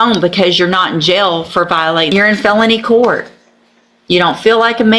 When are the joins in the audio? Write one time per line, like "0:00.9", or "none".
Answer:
0:02.1